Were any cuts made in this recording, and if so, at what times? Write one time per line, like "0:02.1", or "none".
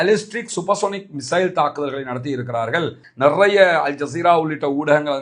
0:03.0